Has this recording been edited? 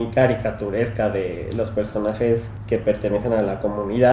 yes; 1 cut; at 2.5 s

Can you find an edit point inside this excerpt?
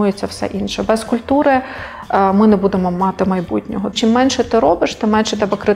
yes; 1 cut; at 4.0 s

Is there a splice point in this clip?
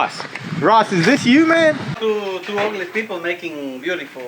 yes; 1 cut; at 2.0 s

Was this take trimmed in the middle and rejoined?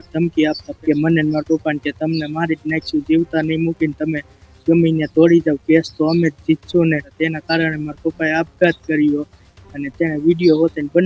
yes; 2 cuts; at 0.8 s, 7.1 s

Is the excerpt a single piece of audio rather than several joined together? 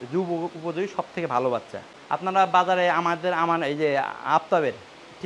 yes; 0 cuts

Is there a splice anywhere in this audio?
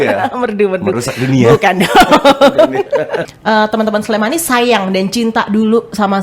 yes; 1 cut; at 3.3 s

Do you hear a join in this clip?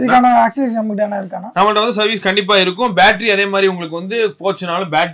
no; 0 cuts

